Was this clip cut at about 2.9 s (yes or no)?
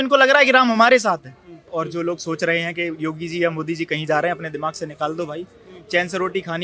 no